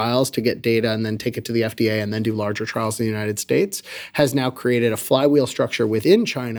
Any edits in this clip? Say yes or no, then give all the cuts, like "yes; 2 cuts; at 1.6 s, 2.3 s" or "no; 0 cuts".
no; 0 cuts